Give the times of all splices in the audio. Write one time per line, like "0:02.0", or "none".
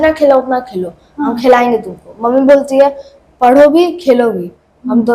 none